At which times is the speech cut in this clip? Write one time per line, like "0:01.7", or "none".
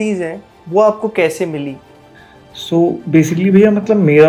none